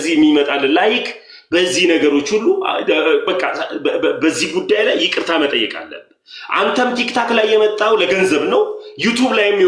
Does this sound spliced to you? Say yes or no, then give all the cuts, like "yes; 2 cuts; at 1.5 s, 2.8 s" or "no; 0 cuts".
no; 0 cuts